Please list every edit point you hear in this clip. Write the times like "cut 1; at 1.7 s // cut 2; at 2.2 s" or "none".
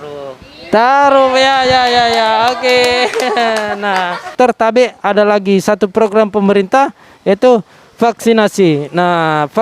cut 1; at 4.3 s